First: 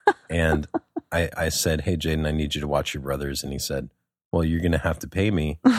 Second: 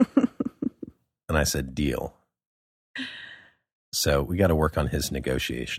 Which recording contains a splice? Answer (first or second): first